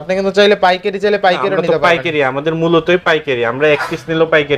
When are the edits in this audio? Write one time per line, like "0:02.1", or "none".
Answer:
none